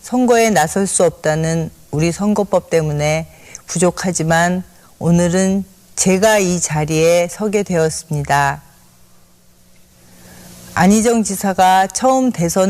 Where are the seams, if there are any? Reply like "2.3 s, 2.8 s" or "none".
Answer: 8.1 s